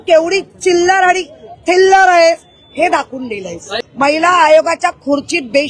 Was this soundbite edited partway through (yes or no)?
yes